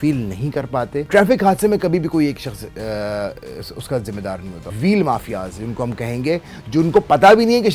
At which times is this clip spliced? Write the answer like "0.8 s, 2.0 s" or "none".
1.0 s, 4.7 s